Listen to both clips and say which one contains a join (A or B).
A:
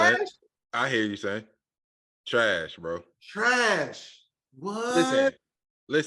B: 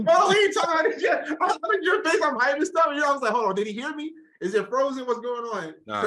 A